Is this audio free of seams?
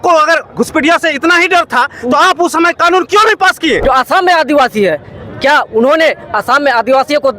no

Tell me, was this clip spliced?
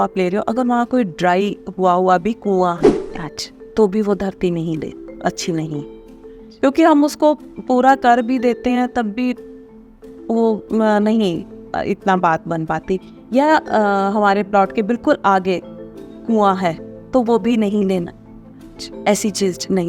no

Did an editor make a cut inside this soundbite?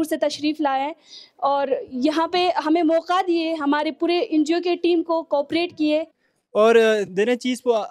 yes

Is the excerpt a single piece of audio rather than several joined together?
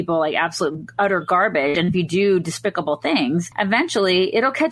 yes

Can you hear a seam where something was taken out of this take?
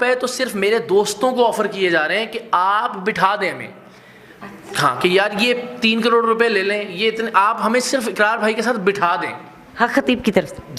no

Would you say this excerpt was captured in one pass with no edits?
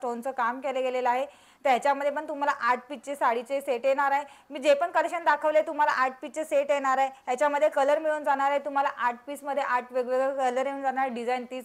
yes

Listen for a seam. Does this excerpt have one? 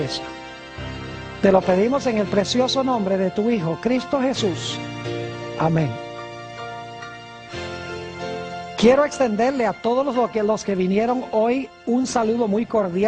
yes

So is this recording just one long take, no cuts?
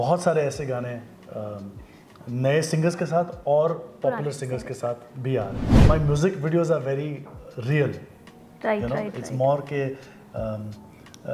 no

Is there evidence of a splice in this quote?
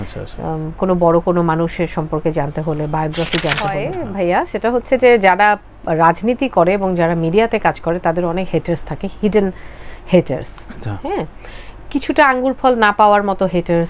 yes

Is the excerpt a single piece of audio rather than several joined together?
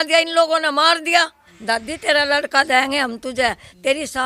no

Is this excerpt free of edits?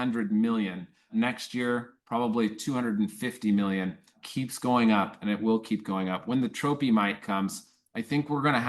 no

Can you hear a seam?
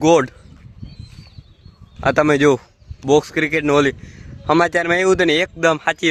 no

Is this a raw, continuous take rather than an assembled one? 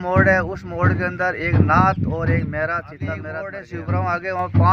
no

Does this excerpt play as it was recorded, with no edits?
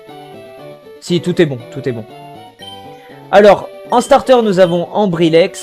no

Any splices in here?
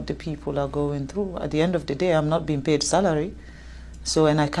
no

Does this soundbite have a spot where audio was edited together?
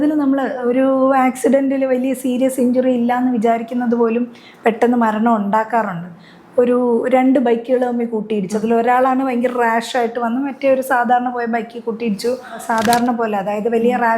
yes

